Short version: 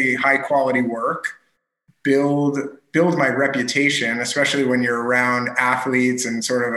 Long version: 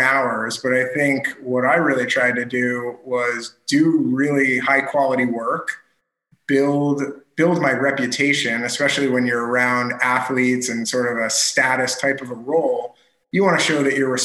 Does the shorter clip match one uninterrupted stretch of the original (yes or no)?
yes